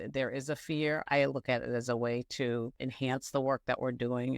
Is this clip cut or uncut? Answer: cut